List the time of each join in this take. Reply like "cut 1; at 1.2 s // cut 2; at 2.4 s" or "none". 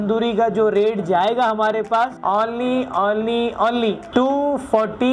cut 1; at 2.2 s // cut 2; at 4.0 s

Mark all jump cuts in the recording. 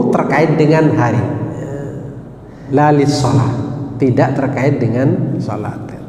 cut 1; at 2.6 s

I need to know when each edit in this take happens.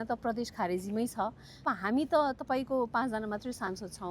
cut 1; at 1.7 s

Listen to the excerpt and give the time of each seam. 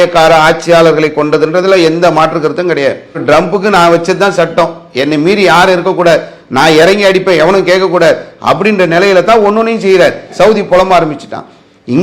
cut 1; at 3.2 s // cut 2; at 10.3 s

